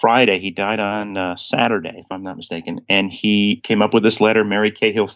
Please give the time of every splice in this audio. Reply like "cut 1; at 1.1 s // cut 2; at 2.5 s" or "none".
cut 1; at 3.6 s